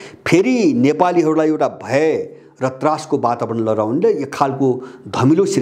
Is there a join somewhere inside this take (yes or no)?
no